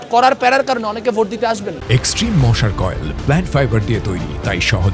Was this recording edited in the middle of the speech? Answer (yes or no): no